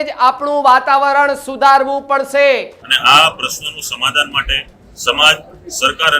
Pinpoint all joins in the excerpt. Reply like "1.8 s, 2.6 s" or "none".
2.8 s